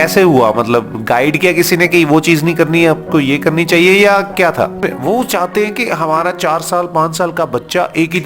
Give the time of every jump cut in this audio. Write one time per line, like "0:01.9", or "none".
0:04.7

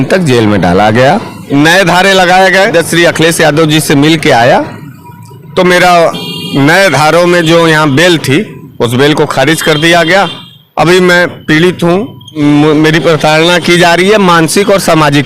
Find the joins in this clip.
0:01.4
0:02.7
0:12.4

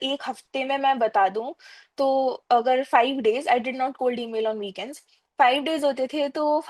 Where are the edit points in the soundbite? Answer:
none

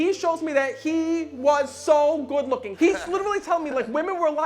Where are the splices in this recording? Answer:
0:02.7

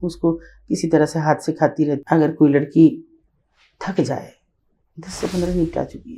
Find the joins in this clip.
0:02.0

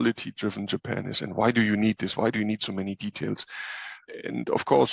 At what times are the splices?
0:04.0

